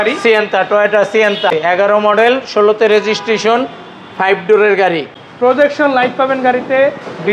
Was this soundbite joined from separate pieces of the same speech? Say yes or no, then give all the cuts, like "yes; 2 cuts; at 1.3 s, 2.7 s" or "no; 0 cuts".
yes; 2 cuts; at 1.5 s, 5.2 s